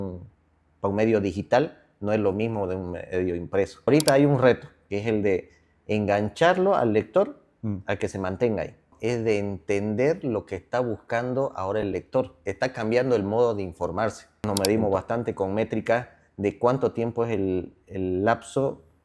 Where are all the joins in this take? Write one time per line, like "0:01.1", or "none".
0:03.9
0:08.9
0:12.4
0:14.5